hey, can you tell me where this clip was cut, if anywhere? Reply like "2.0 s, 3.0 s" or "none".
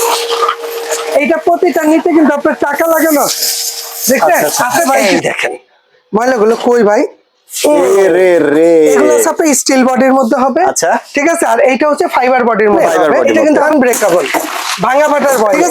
5.0 s, 9.3 s, 13.3 s